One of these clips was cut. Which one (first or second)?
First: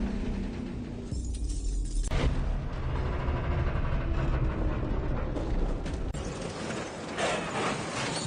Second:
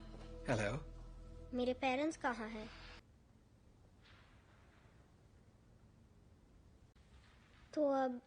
second